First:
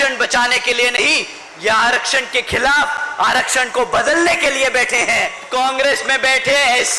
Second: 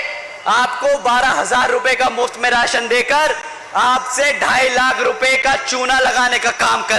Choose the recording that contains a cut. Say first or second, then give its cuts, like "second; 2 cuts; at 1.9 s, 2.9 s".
first; 1 cut; at 5.4 s